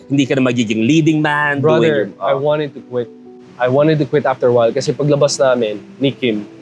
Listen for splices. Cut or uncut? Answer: uncut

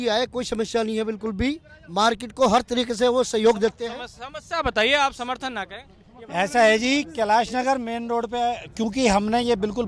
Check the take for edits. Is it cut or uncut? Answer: uncut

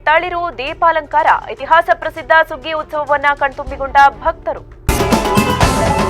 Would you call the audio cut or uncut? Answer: cut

